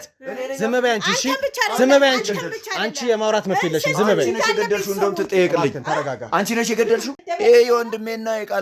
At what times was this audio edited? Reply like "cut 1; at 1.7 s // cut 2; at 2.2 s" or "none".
cut 1; at 7.2 s

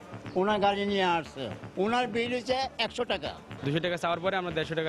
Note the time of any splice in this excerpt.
cut 1; at 3.5 s

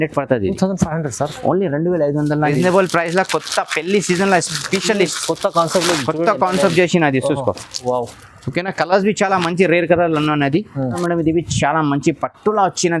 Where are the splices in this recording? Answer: cut 1; at 2.4 s // cut 2; at 11.0 s

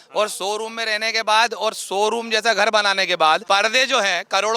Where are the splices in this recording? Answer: cut 1; at 3.4 s

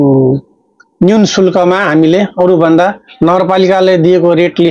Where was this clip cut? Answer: none

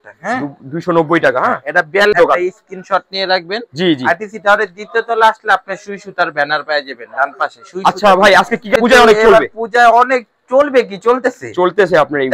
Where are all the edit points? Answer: cut 1; at 2.1 s // cut 2; at 8.8 s

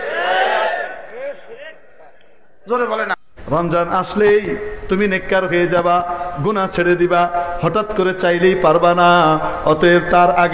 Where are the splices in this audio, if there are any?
cut 1; at 3.1 s

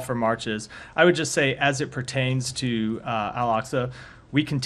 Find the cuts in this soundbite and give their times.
cut 1; at 3.3 s

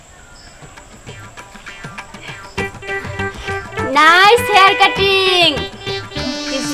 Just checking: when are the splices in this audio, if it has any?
none

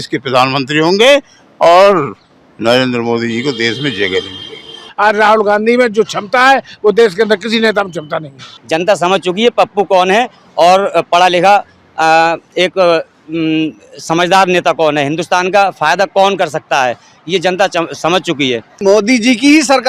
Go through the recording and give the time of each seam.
cut 1; at 4.9 s // cut 2; at 8.5 s // cut 3; at 18.8 s

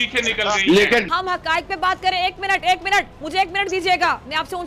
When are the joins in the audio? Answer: cut 1; at 1.1 s

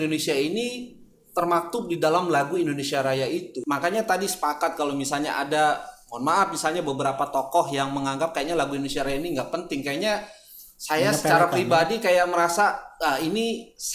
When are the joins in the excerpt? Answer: cut 1; at 3.5 s

